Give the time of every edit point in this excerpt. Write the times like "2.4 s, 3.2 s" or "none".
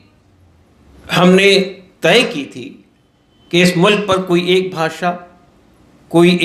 none